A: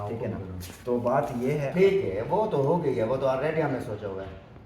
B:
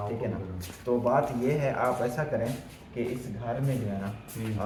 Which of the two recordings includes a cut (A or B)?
A